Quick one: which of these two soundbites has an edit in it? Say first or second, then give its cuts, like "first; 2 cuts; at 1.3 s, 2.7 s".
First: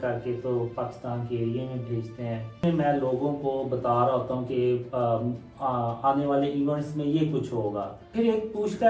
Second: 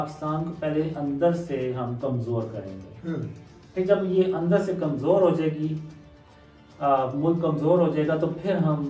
first; 2 cuts; at 2.6 s, 8.0 s